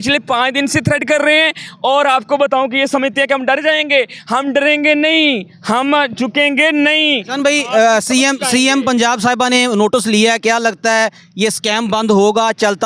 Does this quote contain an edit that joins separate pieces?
no; 0 cuts

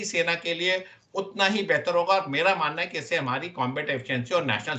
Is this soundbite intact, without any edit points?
yes; 0 cuts

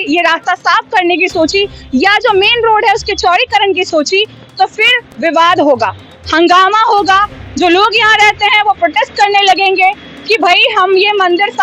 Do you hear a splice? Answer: no; 0 cuts

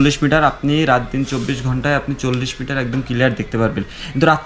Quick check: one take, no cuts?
yes; 0 cuts

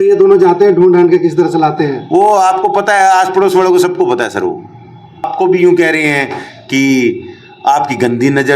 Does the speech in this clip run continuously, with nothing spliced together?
no; 1 cut; at 5.3 s

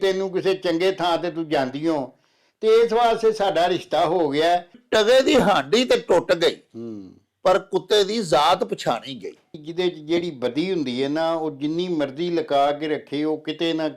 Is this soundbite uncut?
no; 2 cuts; at 4.8 s, 9.5 s

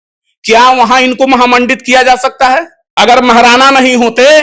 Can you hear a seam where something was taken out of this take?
yes; 1 cut; at 2.8 s

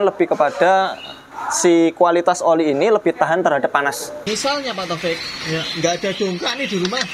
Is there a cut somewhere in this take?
yes; 1 cut; at 4.1 s

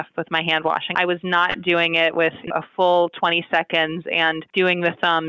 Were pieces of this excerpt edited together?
yes; 3 cuts; at 0.9 s, 2.5 s, 4.4 s

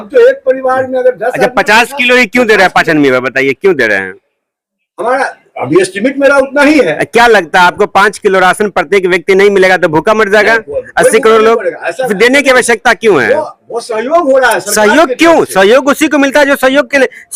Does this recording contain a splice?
no; 0 cuts

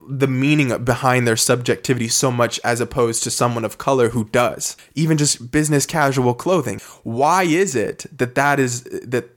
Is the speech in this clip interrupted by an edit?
yes; 2 cuts; at 4.8 s, 6.8 s

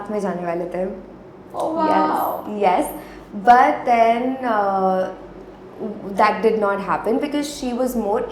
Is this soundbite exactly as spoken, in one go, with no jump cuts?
yes; 0 cuts

